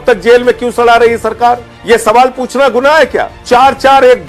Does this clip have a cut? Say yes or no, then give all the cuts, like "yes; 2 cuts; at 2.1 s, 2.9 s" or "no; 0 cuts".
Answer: yes; 2 cuts; at 1.7 s, 3.3 s